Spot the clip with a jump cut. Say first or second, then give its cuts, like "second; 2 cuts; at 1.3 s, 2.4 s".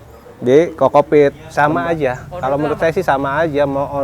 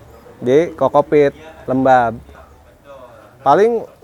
first; 1 cut; at 1.4 s